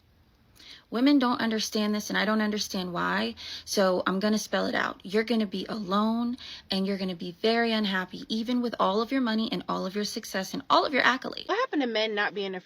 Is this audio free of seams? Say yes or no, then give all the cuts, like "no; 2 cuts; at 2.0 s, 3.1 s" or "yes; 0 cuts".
no; 1 cut; at 11.4 s